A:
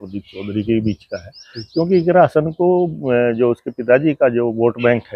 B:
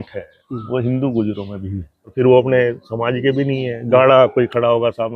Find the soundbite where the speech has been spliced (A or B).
B